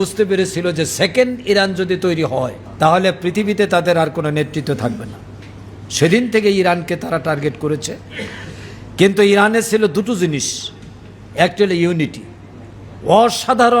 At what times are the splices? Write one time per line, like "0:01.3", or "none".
0:02.6